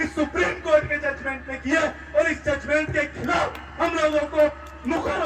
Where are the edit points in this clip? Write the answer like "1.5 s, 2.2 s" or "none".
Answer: none